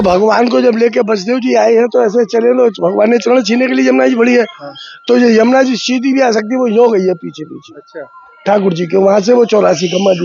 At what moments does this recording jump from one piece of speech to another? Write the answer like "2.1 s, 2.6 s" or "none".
none